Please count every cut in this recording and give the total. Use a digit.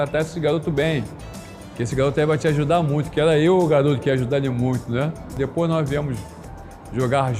1